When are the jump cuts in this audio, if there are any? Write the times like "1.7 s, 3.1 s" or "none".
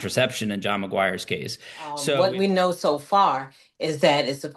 2.0 s

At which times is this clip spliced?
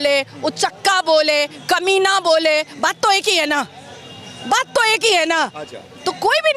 none

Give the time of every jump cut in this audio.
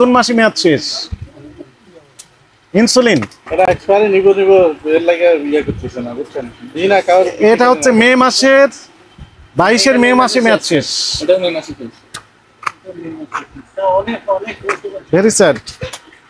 none

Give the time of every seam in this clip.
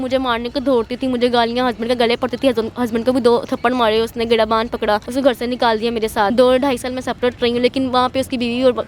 5.1 s, 6.3 s

